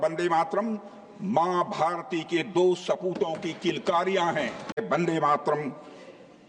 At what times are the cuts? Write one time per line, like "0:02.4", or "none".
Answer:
0:04.8